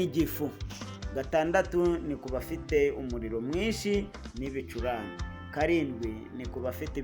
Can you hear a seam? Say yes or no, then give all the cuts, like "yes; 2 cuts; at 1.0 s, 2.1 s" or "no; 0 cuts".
no; 0 cuts